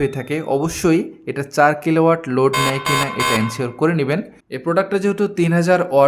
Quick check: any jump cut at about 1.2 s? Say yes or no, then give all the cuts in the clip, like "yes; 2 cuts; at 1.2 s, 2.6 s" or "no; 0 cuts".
no; 1 cut; at 4.4 s